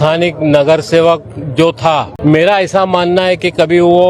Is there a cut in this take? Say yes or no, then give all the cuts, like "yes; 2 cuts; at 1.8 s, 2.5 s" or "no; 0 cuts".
yes; 1 cut; at 2.1 s